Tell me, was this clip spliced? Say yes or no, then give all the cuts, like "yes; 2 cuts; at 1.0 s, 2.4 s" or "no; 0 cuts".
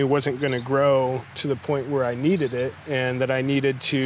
yes; 1 cut; at 2.8 s